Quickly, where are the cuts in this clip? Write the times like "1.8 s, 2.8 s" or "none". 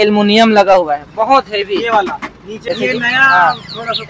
2.7 s